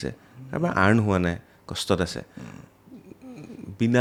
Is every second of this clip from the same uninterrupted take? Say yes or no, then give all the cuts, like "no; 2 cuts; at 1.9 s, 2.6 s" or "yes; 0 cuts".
yes; 0 cuts